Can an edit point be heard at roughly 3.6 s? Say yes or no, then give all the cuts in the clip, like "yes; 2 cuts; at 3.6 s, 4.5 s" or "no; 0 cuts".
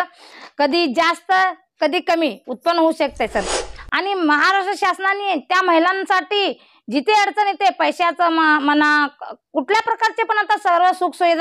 yes; 1 cut; at 3.6 s